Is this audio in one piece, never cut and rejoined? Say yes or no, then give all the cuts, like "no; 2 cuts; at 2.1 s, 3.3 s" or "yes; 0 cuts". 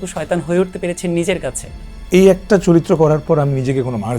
yes; 0 cuts